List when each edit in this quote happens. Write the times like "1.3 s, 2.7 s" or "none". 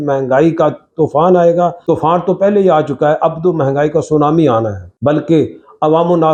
none